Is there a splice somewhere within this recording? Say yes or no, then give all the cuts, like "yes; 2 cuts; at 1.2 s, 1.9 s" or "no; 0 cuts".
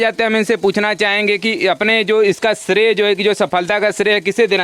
no; 0 cuts